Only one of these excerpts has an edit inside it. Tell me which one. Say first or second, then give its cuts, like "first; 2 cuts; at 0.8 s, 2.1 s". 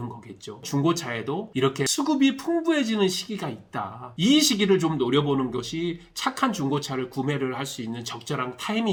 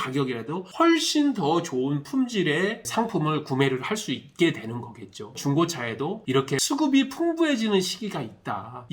second; 1 cut; at 2.8 s